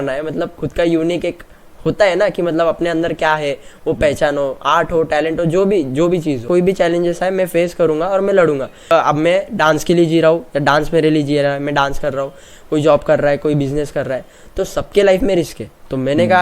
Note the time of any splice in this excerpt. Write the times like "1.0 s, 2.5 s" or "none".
6.4 s, 8.9 s

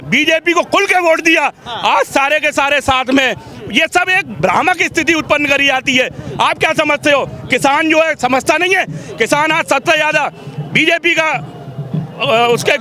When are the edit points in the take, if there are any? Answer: none

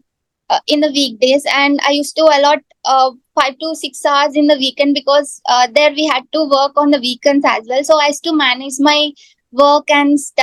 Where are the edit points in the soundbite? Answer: none

